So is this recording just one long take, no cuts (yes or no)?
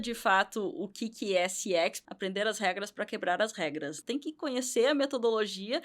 no